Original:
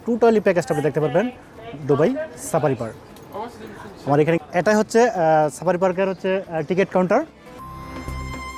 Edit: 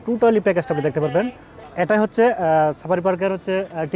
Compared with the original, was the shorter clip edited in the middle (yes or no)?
yes